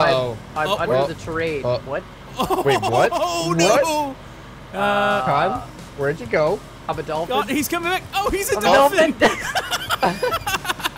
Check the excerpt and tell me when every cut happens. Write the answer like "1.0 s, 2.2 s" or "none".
none

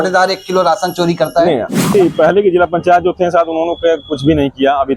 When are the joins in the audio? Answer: 1.9 s

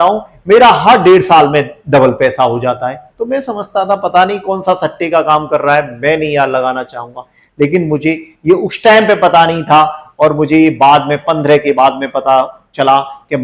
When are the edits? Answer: none

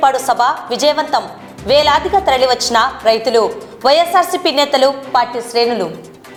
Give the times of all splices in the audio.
none

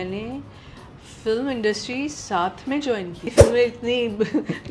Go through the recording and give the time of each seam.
3.3 s

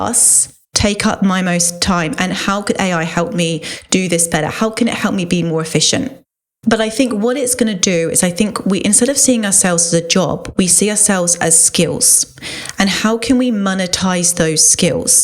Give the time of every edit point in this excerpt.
6.2 s

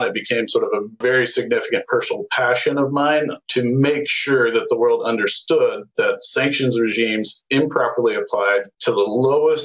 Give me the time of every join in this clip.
1.0 s

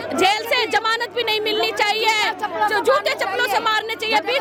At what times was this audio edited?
none

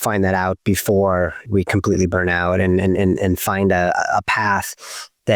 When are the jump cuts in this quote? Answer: 1.4 s

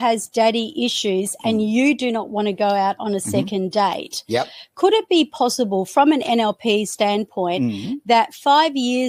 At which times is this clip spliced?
none

